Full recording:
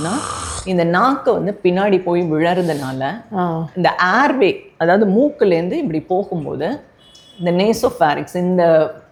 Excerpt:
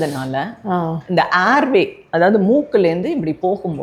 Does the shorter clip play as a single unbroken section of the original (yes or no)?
yes